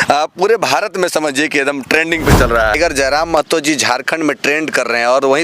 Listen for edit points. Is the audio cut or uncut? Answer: cut